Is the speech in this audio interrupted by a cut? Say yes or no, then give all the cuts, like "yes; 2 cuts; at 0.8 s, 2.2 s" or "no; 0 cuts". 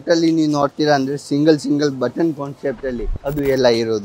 yes; 1 cut; at 3.1 s